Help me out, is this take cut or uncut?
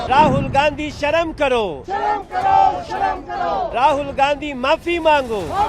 cut